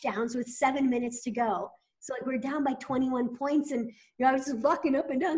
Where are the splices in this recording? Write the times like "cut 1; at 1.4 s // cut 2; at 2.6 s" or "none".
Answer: none